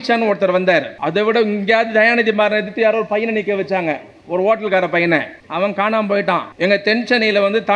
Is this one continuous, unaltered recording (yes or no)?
no